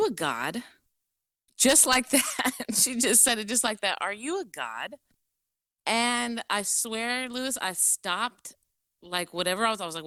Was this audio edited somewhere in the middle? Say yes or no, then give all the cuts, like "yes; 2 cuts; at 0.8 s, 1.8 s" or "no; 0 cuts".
no; 0 cuts